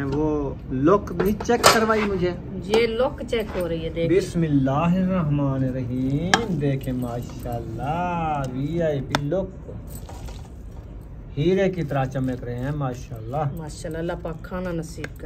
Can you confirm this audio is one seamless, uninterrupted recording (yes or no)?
yes